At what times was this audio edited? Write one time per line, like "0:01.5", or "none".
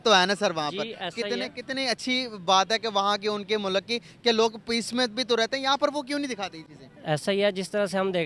none